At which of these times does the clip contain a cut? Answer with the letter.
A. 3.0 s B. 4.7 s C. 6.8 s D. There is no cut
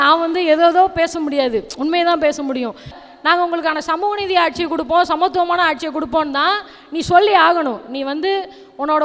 A